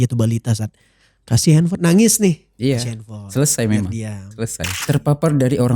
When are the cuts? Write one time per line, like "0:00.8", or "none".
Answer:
0:04.8